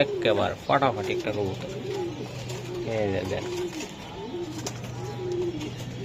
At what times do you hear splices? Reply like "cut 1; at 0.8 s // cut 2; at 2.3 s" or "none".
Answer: none